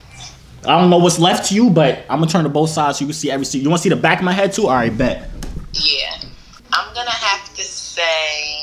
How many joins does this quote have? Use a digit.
1